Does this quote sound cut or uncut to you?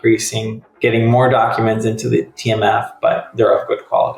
cut